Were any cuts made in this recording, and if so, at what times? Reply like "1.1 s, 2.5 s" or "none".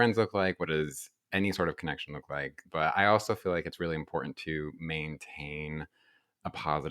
2.6 s